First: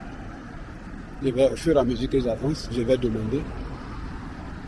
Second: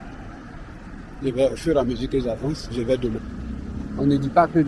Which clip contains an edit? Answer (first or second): second